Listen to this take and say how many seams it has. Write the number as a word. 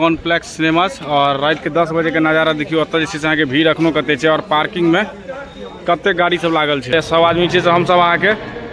one